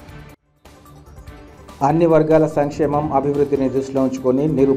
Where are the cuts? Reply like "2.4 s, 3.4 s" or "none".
none

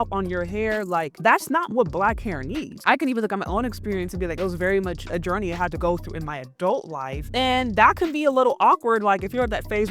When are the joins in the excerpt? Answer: 2.8 s

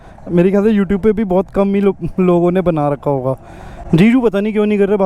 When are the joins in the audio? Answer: none

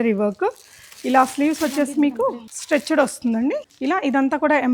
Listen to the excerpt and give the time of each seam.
2.5 s, 3.7 s

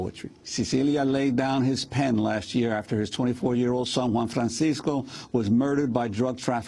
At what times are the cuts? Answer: 4.2 s

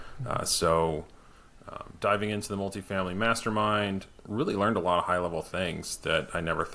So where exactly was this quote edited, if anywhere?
none

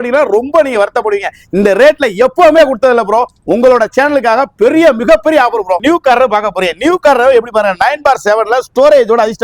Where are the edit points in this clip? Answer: 5.8 s

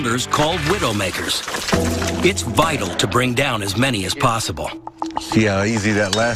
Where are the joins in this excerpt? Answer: 4.5 s

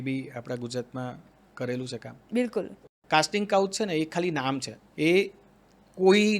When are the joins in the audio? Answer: 2.8 s

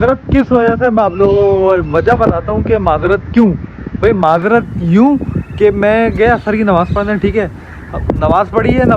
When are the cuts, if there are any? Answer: none

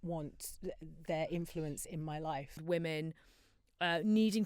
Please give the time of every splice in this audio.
2.6 s

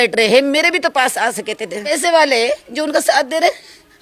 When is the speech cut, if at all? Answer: 1.8 s

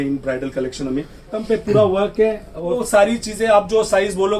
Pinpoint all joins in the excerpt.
1.4 s, 2.8 s

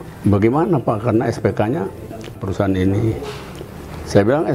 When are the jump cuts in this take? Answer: 2.4 s

